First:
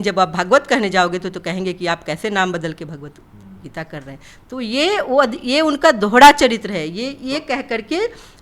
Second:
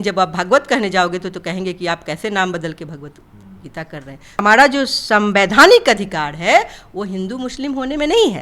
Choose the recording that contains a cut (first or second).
second